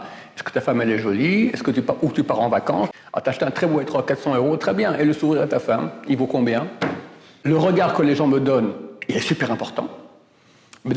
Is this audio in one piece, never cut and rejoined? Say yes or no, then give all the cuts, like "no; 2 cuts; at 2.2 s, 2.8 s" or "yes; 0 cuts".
no; 2 cuts; at 2.9 s, 7.4 s